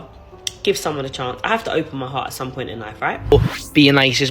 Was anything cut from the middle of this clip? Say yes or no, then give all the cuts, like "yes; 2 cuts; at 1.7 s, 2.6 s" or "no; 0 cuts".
yes; 1 cut; at 3.3 s